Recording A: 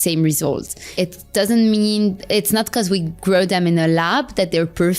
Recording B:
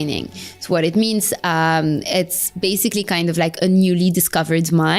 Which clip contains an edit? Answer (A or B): A